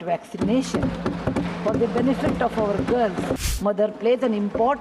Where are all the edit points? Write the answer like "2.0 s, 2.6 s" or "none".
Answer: 3.5 s